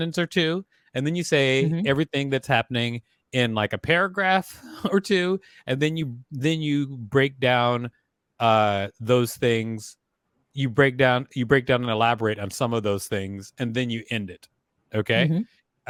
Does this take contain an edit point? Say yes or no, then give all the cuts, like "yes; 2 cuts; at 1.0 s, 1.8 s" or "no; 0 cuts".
no; 0 cuts